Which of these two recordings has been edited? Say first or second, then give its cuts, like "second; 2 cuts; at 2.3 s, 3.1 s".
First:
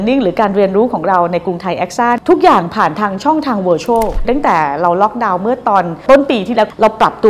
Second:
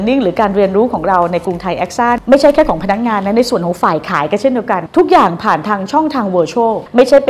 first; 2 cuts; at 2.2 s, 4.2 s